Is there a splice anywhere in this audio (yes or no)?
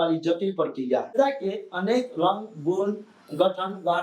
yes